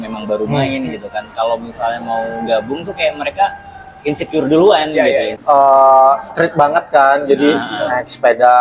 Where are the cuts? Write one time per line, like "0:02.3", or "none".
0:05.3